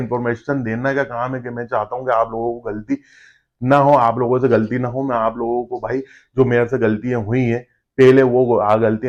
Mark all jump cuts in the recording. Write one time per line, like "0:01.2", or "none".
none